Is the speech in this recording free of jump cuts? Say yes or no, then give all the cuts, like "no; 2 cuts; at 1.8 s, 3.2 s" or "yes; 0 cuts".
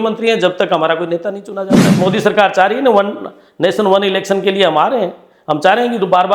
no; 1 cut; at 1.9 s